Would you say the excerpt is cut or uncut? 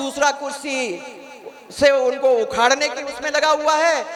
uncut